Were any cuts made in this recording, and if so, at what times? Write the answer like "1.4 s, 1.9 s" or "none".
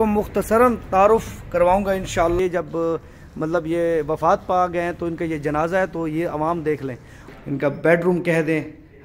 2.4 s, 7.2 s